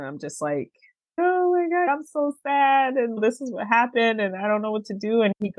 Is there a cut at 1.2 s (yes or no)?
no